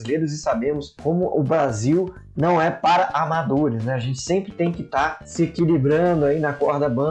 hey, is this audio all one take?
no; 2 cuts; at 0.9 s, 5.2 s

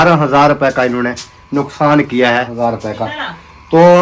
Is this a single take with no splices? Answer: no; 1 cut; at 2.5 s

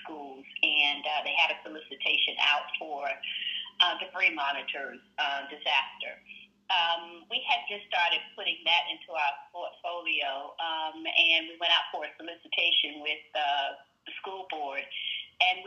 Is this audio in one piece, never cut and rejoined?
yes; 0 cuts

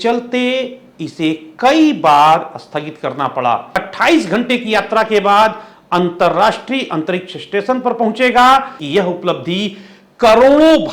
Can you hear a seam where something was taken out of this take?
yes; 2 cuts; at 3.9 s, 8.8 s

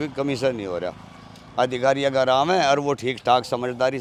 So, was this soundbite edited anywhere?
no; 0 cuts

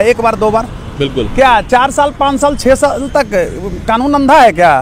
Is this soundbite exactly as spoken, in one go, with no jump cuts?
yes; 0 cuts

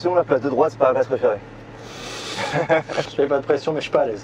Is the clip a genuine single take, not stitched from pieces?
yes; 0 cuts

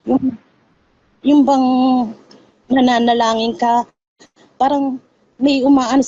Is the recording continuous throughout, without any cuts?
yes; 0 cuts

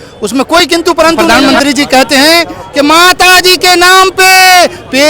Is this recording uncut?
no; 1 cut; at 1.2 s

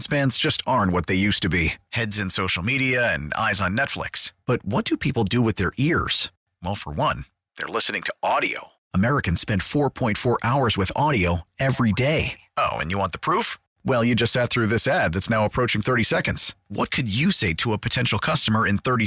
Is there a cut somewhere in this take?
no; 0 cuts

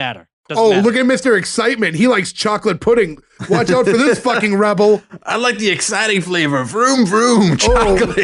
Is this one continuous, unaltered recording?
yes; 0 cuts

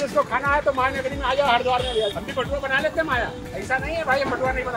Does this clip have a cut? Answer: yes; 2 cuts; at 2.1 s, 3.4 s

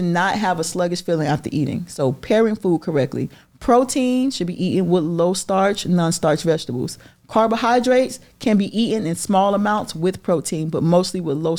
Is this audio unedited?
yes; 0 cuts

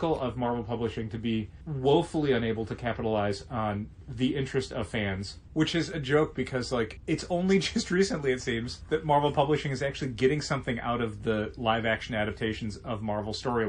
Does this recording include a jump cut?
yes; 3 cuts; at 5.3 s, 7.0 s, 8.7 s

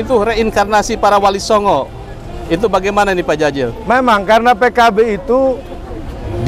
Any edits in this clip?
no; 0 cuts

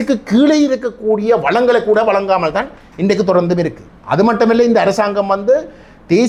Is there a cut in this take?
no; 0 cuts

